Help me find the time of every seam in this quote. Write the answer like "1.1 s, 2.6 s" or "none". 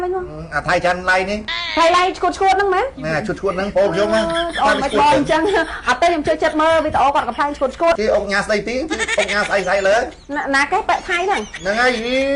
1.6 s, 8.0 s, 10.2 s